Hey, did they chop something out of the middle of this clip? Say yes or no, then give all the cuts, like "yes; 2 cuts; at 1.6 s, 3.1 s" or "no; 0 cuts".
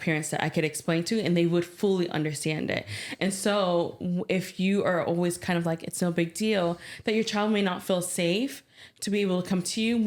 no; 0 cuts